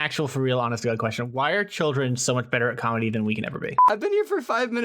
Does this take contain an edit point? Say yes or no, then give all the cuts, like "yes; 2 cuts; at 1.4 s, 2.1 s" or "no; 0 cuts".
yes; 1 cut; at 3.8 s